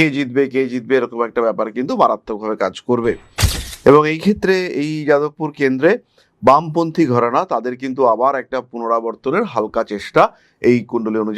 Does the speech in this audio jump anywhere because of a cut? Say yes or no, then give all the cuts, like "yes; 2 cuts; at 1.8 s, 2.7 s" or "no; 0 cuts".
no; 0 cuts